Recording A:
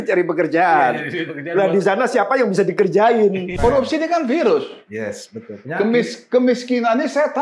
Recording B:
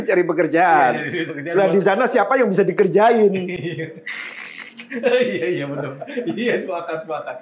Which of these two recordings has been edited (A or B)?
A